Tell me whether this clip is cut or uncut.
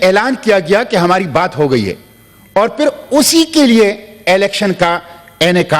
uncut